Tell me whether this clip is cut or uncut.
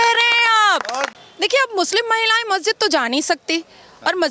cut